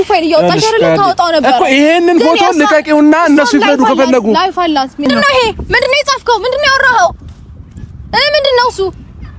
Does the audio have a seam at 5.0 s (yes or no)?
yes